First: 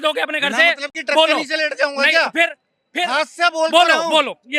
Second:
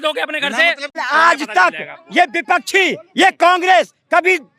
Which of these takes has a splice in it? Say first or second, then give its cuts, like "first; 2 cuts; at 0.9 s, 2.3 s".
second; 1 cut; at 1.0 s